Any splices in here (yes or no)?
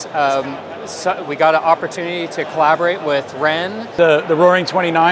yes